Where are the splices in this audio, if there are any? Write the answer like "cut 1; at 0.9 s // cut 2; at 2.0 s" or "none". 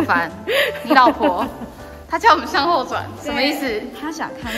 none